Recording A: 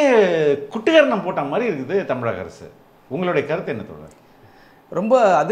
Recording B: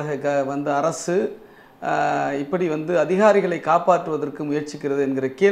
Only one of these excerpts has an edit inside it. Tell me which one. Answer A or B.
A